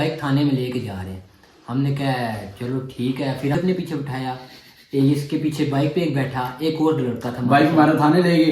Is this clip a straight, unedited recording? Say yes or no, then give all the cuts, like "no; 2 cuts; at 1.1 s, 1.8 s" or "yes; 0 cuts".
no; 1 cut; at 3.5 s